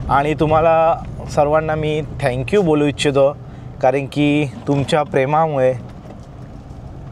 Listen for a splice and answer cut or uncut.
uncut